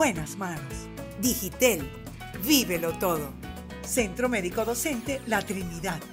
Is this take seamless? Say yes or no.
yes